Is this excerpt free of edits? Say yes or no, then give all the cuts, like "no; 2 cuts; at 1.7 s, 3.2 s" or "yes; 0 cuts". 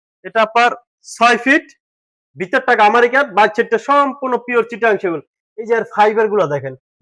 yes; 0 cuts